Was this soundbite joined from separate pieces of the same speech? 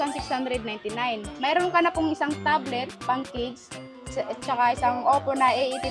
no; 0 cuts

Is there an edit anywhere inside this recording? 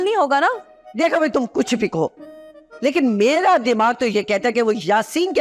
no; 0 cuts

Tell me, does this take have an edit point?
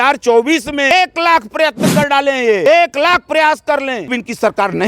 yes; 3 cuts; at 0.9 s, 2.7 s, 4.1 s

